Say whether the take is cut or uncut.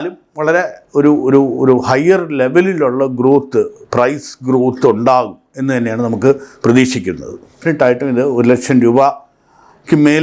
cut